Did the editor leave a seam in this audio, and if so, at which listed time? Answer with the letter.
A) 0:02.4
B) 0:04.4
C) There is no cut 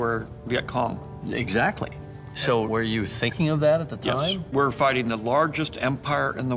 B